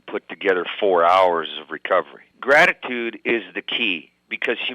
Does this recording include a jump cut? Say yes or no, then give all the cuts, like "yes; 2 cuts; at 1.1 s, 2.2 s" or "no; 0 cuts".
yes; 1 cut; at 2.2 s